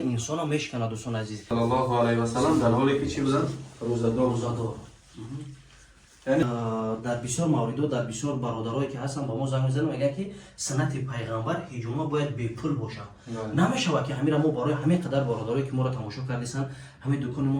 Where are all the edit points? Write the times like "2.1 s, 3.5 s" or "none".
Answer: 1.4 s, 6.4 s